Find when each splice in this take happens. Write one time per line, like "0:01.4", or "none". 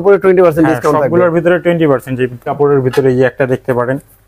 0:02.4